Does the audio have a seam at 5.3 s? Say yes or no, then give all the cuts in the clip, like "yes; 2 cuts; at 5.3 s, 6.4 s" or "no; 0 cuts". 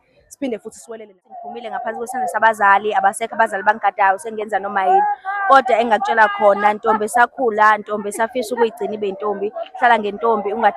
no; 1 cut; at 1.5 s